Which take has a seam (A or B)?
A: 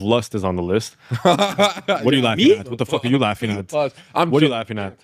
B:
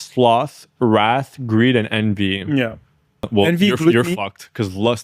B